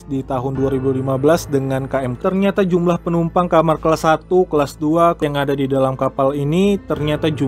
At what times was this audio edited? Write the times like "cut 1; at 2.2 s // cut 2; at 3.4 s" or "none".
cut 1; at 2.2 s // cut 2; at 5.2 s

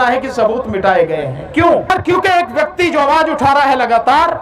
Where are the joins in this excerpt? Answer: cut 1; at 1.9 s

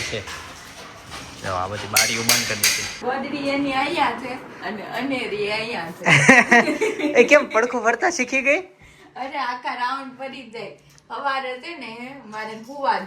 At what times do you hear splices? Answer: cut 1; at 2.9 s

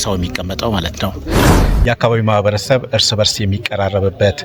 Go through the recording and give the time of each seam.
cut 1; at 1.4 s

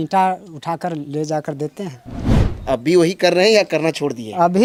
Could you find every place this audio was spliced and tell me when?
none

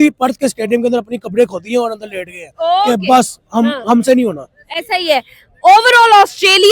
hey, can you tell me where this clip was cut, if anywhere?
none

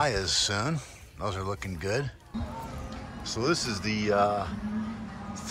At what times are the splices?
cut 1; at 2.2 s

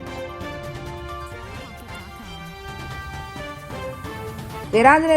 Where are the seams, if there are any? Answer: cut 1; at 3.9 s

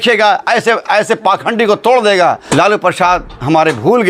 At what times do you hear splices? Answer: cut 1; at 2.4 s

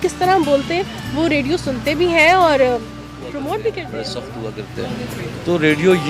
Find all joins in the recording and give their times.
cut 1; at 4.1 s

